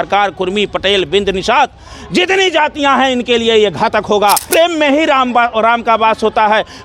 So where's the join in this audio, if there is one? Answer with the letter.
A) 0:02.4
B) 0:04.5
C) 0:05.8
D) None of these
B